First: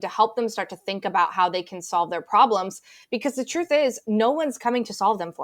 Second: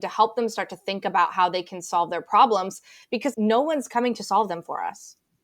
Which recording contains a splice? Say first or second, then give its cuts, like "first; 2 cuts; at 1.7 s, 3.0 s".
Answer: second; 1 cut; at 3.3 s